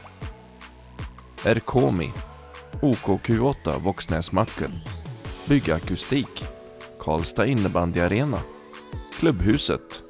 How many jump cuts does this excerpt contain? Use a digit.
1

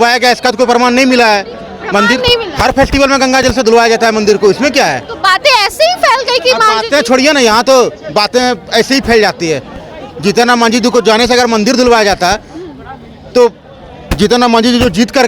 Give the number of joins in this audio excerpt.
0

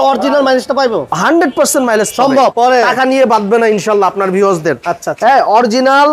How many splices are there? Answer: 1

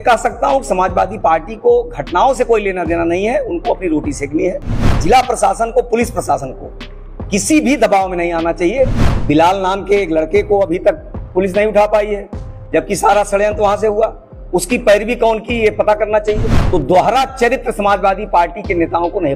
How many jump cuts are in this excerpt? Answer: 3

